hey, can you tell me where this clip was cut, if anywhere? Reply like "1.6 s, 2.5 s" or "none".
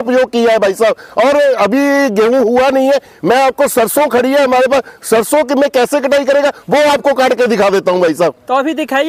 none

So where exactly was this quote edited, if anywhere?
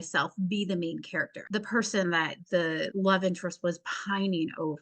1.3 s, 2.7 s

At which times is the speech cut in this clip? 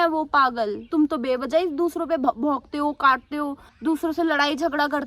0.9 s, 3.6 s

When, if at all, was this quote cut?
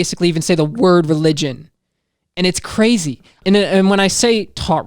3.3 s

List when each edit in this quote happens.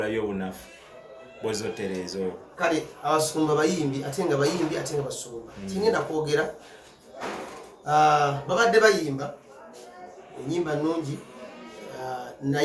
none

